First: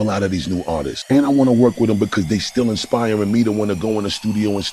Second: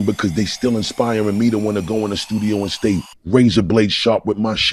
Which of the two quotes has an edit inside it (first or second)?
first